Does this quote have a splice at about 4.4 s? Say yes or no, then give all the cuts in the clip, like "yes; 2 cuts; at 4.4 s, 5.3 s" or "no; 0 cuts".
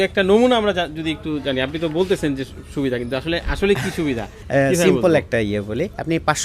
yes; 1 cut; at 4.4 s